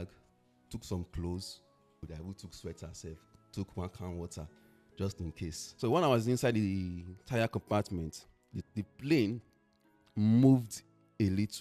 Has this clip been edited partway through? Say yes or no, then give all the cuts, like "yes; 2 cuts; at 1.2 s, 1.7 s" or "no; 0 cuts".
yes; 2 cuts; at 2.1 s, 5.6 s